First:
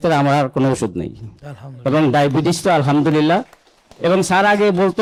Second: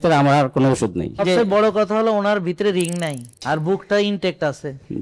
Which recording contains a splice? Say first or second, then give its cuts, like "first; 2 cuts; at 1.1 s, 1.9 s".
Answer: second; 2 cuts; at 1.2 s, 3.3 s